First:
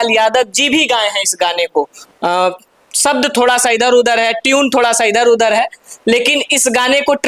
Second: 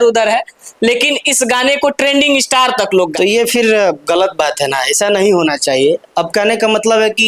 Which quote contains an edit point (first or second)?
second